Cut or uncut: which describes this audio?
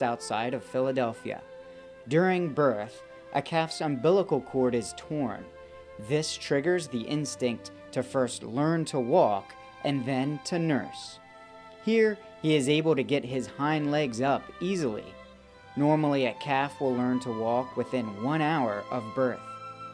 cut